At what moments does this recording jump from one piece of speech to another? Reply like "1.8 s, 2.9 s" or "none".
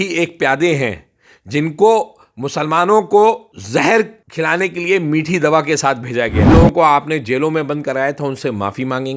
3.5 s, 4.2 s, 6.5 s